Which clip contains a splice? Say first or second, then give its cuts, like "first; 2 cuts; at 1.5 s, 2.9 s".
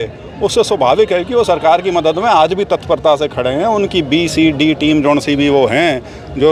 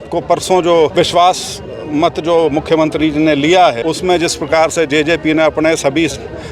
second; 2 cuts; at 0.9 s, 3.8 s